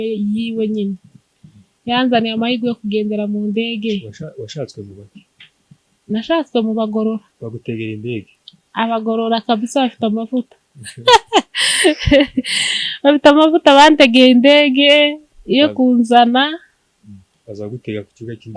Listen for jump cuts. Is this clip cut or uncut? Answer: uncut